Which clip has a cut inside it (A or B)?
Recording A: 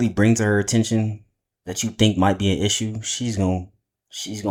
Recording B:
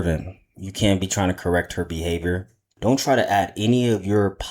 B